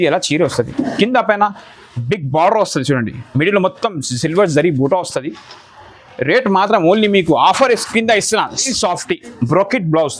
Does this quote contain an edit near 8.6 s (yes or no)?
yes